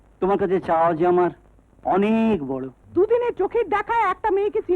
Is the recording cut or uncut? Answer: cut